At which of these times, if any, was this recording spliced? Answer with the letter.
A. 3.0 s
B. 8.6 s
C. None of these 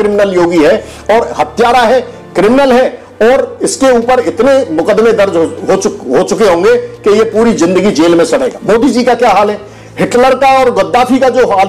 B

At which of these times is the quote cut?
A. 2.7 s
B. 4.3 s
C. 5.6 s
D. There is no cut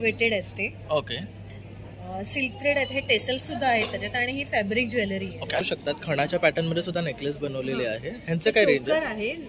C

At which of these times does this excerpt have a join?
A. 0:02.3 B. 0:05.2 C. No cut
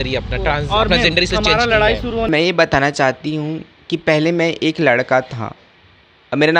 A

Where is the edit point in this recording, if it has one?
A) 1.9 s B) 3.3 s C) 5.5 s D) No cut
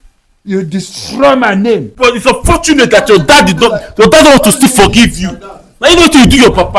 A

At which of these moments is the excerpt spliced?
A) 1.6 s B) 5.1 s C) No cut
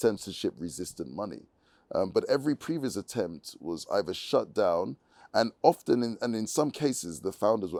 C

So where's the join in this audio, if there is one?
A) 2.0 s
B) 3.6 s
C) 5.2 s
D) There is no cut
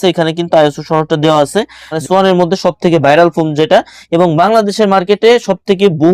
A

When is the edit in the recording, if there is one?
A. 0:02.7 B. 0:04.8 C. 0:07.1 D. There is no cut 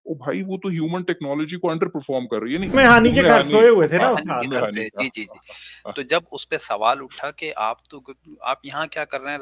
A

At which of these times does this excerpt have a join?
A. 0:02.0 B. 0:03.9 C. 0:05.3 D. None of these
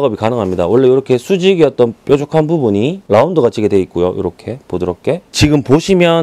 C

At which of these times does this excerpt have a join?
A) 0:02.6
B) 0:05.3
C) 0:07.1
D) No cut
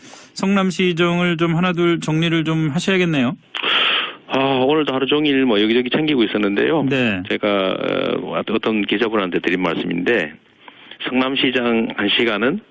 A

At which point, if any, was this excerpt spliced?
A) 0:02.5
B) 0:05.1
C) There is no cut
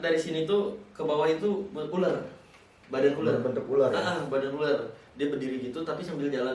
C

